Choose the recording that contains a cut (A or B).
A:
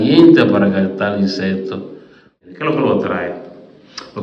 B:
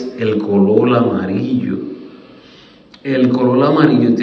A